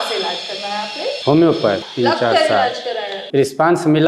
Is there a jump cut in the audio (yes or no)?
yes